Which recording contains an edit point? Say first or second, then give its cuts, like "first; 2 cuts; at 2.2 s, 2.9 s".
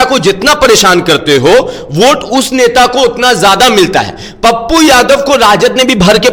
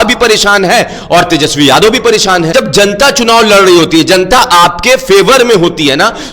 second; 1 cut; at 2.5 s